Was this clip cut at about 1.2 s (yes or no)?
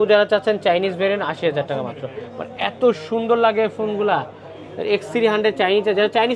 no